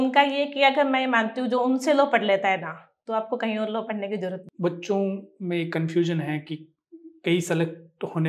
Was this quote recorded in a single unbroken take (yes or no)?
no